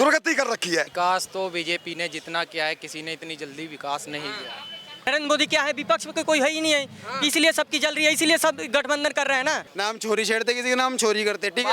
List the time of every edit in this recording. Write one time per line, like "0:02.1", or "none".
0:00.9
0:05.1
0:09.7

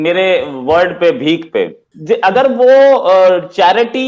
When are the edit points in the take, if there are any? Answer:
0:01.9

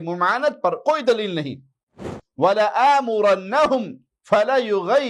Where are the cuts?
0:01.9

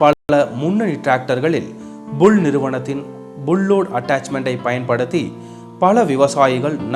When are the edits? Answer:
none

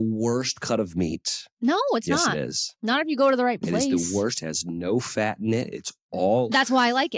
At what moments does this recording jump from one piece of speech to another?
0:01.5

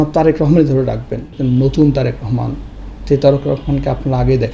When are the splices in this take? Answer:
0:01.3

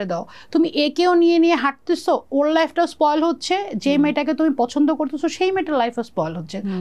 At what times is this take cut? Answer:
none

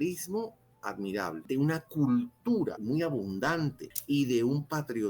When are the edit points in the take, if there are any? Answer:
0:01.4
0:02.8
0:03.9

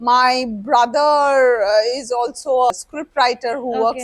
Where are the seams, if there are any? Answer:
0:02.7

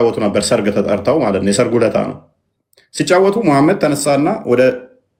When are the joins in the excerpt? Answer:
none

